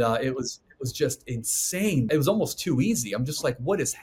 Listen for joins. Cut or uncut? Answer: cut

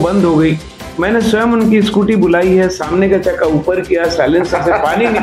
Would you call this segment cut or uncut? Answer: uncut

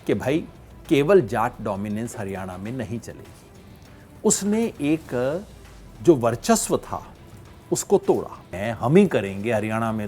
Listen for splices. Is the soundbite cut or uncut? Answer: cut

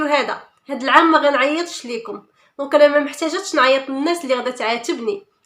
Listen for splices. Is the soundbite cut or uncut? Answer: uncut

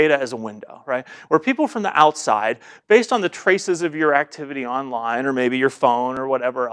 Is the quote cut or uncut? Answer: uncut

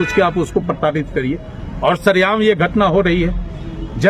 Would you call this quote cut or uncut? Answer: uncut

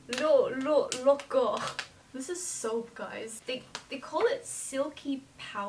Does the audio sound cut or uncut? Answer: cut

